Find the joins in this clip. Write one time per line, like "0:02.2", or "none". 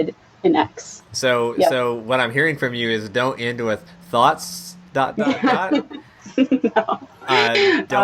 none